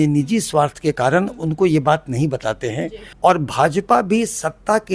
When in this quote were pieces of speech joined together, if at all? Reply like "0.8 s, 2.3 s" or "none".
3.0 s